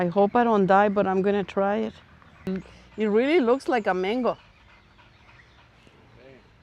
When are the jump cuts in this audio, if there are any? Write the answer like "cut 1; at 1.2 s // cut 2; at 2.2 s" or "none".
cut 1; at 2.5 s